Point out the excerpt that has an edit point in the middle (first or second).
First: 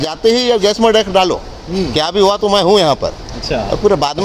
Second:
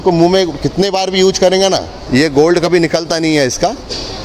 second